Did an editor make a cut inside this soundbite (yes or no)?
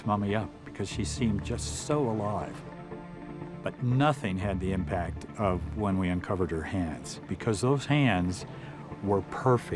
yes